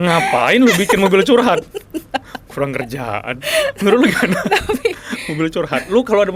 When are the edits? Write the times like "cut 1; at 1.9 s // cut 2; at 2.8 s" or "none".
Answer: none